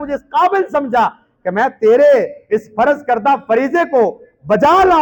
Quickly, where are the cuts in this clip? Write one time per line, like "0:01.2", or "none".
none